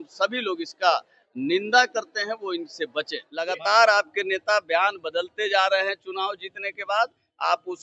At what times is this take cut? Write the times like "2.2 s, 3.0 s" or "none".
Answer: 3.3 s